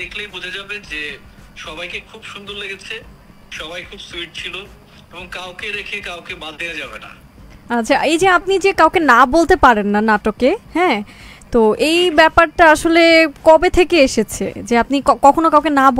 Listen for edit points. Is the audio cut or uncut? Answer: uncut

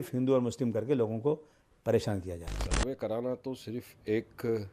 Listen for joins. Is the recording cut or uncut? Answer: cut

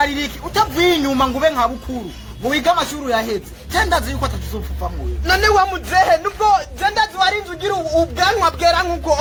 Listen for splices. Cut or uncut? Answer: uncut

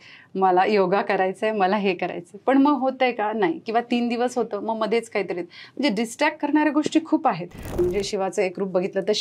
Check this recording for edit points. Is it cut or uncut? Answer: cut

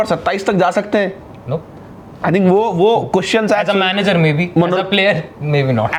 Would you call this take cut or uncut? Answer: uncut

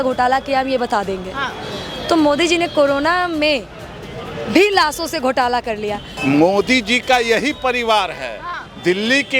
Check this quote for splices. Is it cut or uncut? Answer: cut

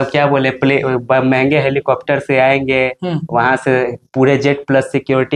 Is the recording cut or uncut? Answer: uncut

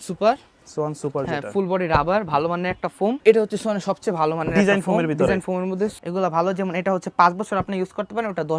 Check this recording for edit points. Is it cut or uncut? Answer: cut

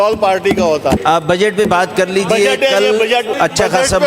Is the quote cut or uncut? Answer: cut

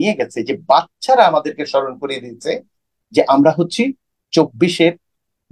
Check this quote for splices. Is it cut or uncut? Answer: uncut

